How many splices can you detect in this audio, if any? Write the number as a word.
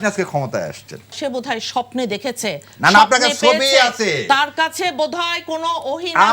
one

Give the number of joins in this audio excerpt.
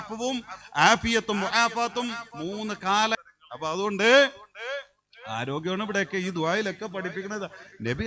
one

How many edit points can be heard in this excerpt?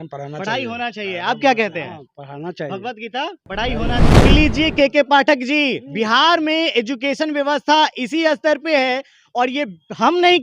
one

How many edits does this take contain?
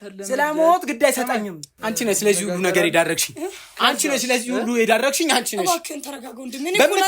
one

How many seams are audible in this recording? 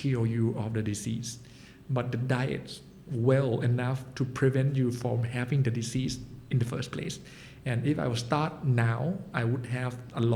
zero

